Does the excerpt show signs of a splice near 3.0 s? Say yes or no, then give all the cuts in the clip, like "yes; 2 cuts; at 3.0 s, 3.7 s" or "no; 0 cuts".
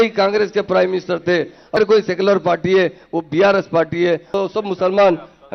no; 2 cuts; at 1.8 s, 4.4 s